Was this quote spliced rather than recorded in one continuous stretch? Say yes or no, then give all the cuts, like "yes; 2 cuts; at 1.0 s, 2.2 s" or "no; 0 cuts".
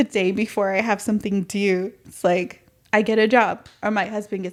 no; 0 cuts